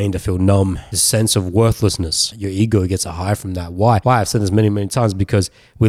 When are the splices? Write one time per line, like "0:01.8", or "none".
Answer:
0:00.9
0:02.3
0:04.0